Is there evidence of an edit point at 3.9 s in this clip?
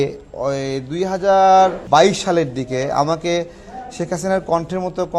no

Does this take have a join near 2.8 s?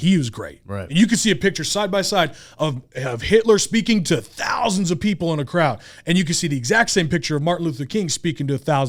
no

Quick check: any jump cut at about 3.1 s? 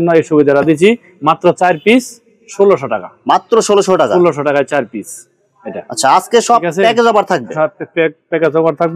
no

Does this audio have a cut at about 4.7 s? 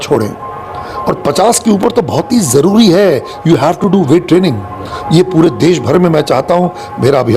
no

